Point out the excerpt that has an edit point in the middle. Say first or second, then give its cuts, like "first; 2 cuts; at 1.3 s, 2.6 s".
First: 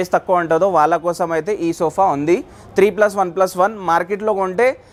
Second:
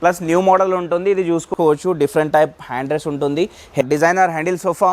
second; 2 cuts; at 1.5 s, 3.8 s